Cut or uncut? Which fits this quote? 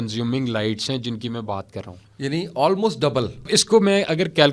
cut